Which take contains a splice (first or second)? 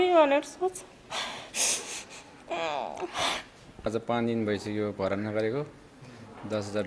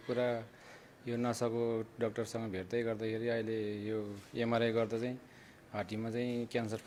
first